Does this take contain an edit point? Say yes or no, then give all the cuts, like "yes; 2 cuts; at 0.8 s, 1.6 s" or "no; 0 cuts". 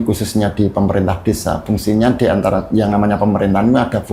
no; 0 cuts